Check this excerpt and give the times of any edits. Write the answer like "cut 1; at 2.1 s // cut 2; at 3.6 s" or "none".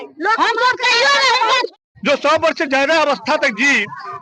cut 1; at 1.7 s